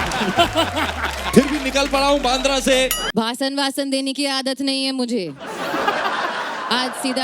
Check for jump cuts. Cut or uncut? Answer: cut